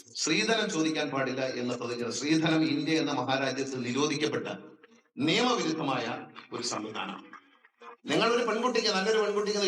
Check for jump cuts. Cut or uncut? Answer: uncut